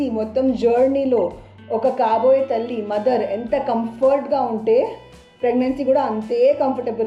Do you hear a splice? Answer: no; 0 cuts

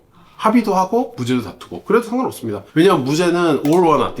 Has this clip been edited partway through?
yes; 1 cut; at 2.6 s

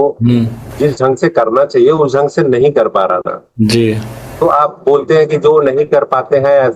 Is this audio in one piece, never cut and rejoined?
yes; 0 cuts

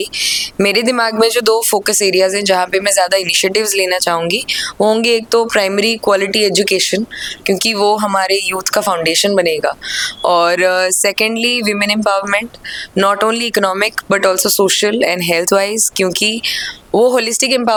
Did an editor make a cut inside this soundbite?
no; 0 cuts

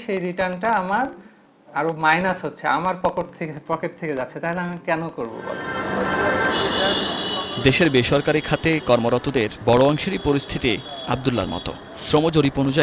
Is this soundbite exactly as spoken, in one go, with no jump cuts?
yes; 0 cuts

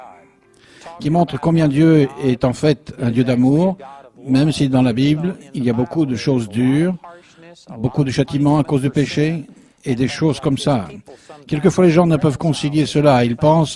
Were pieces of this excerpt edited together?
no; 0 cuts

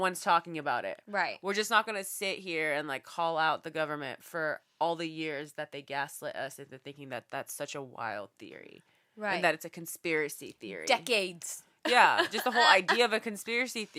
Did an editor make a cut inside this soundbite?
no; 0 cuts

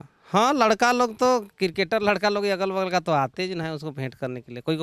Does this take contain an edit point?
no; 0 cuts

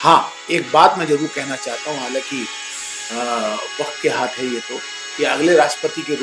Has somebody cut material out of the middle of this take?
no; 0 cuts

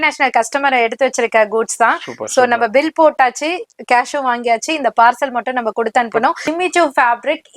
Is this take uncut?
no; 1 cut; at 6.4 s

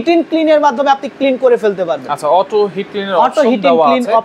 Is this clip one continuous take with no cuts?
yes; 0 cuts

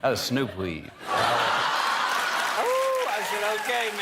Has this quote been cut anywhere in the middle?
yes; 1 cut; at 2.6 s

